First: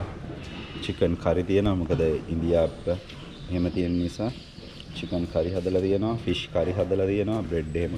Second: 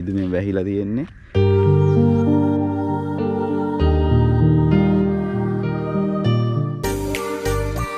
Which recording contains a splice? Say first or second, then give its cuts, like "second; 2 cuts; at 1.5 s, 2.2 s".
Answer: second; 1 cut; at 6.8 s